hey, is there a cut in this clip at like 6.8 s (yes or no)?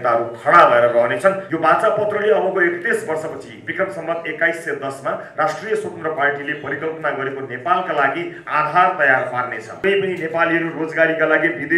no